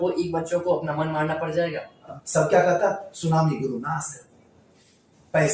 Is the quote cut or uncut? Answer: cut